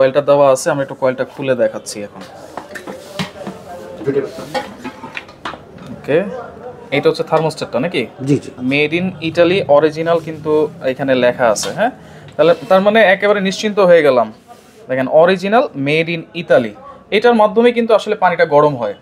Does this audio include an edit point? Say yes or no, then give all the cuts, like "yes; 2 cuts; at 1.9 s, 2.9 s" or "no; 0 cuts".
no; 0 cuts